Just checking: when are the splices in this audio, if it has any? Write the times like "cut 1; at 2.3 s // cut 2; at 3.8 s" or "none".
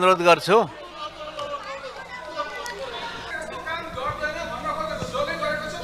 cut 1; at 3.3 s